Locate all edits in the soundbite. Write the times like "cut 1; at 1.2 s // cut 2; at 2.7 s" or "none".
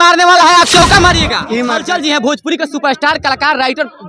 cut 1; at 1.8 s